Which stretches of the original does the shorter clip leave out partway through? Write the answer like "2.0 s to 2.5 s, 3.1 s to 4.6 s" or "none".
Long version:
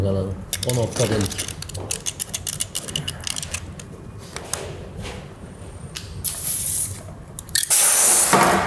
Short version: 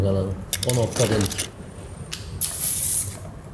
1.5 s to 5.3 s